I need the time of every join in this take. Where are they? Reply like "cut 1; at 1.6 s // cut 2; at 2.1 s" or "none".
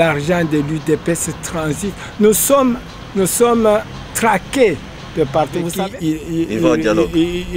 cut 1; at 5.7 s